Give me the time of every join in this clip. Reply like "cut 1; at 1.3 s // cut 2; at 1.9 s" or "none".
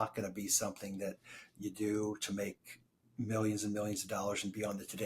none